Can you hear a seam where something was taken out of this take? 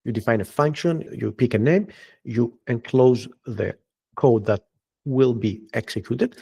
yes; 1 cut; at 1.1 s

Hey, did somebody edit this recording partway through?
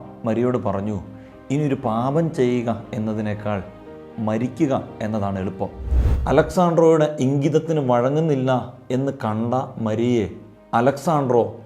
yes; 1 cut; at 6.1 s

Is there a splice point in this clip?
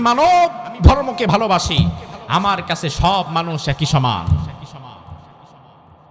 no; 0 cuts

